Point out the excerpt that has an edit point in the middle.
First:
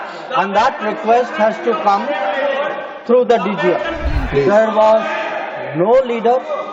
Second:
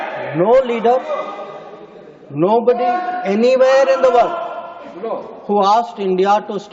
first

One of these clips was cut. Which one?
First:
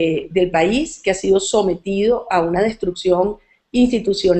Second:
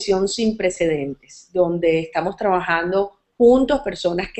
first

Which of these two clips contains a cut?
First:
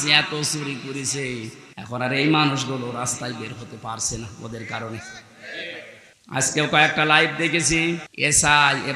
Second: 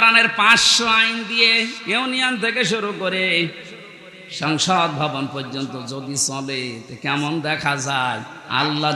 first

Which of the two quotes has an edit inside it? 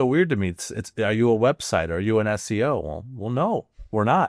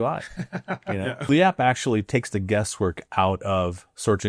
second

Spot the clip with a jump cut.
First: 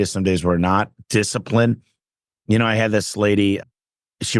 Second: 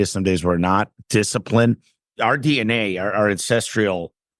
second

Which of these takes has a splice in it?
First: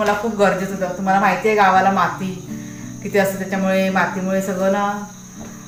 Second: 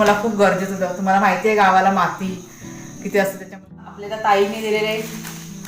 second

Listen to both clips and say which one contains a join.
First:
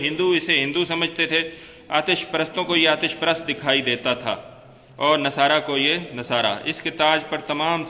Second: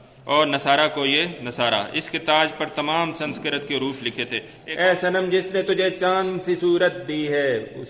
second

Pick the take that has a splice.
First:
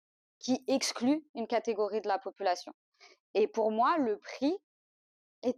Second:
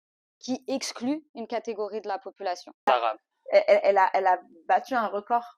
second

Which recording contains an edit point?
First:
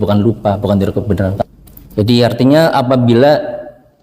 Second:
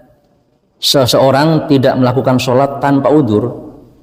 first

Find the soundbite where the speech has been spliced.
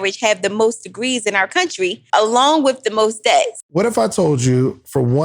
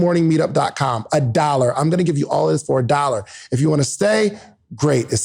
first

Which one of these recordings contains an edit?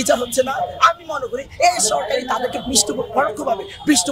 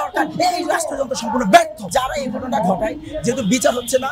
second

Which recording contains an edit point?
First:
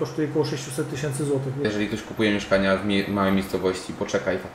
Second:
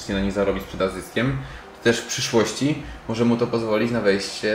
first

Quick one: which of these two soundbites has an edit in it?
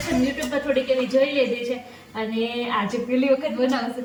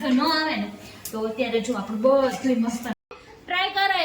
second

